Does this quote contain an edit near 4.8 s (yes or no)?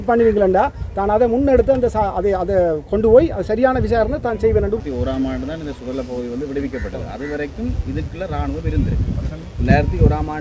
yes